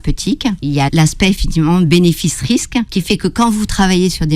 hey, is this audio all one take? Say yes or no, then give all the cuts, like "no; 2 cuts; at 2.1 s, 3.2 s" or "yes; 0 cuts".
no; 2 cuts; at 0.9 s, 2.9 s